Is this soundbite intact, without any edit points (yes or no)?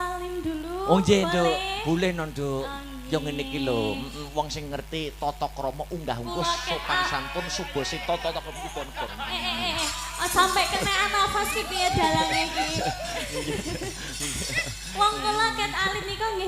yes